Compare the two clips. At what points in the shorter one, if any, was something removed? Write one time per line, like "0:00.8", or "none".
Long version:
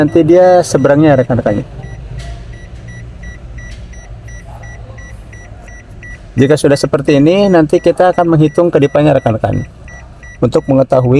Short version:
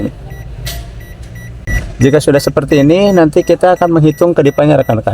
0:01.6